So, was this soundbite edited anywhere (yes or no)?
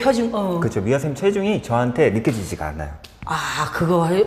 no